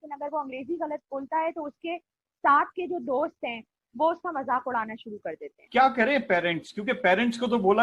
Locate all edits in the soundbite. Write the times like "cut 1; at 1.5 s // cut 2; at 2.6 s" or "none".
cut 1; at 5.6 s